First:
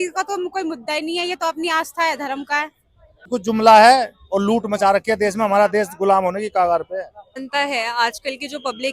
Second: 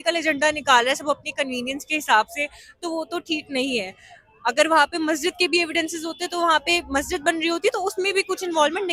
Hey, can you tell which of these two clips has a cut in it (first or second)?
first